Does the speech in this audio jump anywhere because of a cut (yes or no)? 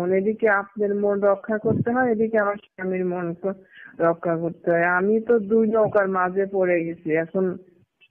no